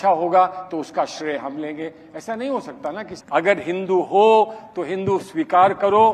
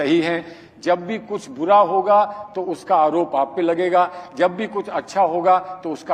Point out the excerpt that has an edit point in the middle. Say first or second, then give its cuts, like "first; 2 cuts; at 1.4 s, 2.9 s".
first; 1 cut; at 3.1 s